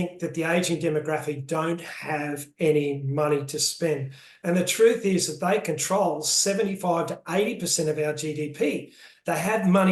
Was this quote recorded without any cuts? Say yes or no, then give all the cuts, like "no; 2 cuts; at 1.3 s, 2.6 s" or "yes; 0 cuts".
yes; 0 cuts